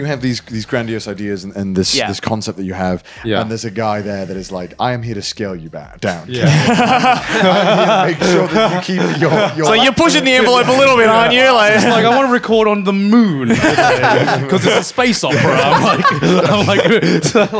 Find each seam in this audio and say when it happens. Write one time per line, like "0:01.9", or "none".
none

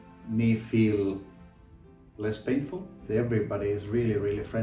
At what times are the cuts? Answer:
0:03.0

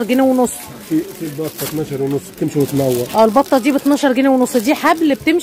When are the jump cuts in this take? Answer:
none

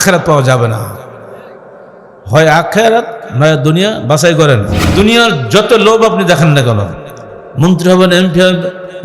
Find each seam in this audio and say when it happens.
0:04.8

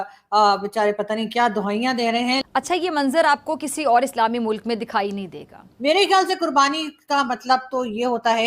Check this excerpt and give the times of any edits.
0:02.4
0:05.5

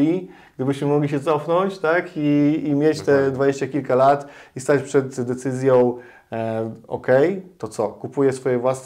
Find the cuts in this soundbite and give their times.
none

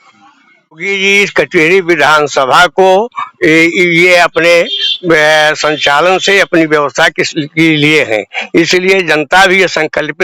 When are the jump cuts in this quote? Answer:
0:00.9

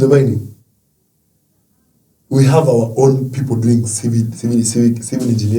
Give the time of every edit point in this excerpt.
none

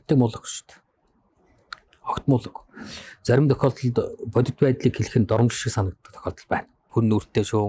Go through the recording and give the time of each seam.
0:06.8

